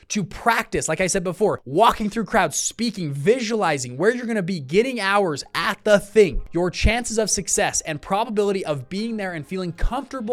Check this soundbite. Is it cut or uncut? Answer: cut